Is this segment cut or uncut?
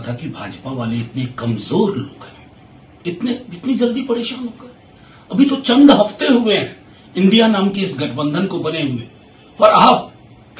uncut